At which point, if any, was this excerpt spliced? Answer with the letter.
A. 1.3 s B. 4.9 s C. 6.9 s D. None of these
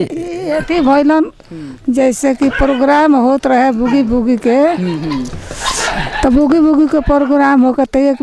D